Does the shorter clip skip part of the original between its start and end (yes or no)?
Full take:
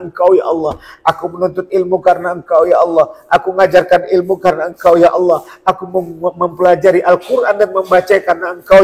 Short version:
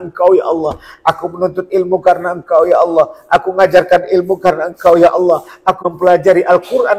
yes